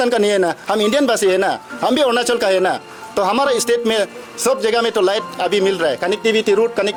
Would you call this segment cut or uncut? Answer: uncut